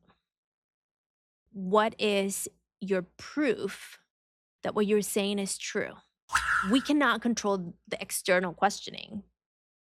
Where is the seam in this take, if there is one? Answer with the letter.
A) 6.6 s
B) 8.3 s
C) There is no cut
A